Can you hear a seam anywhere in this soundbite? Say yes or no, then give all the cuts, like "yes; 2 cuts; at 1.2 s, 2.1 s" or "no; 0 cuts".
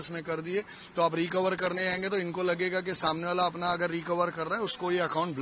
no; 0 cuts